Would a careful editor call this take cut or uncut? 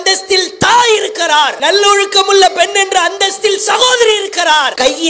cut